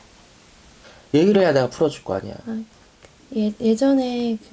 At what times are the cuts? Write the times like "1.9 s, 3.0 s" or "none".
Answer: none